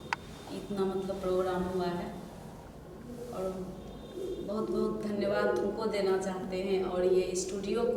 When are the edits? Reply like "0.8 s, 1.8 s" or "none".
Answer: none